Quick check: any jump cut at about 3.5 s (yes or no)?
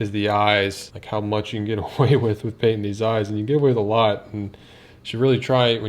no